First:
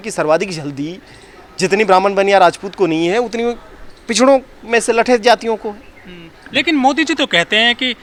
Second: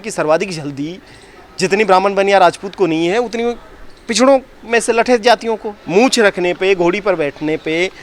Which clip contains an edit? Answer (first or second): second